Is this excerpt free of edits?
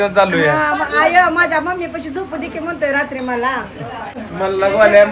no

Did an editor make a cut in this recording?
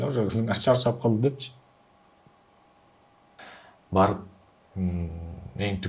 yes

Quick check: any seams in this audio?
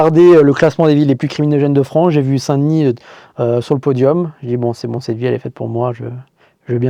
no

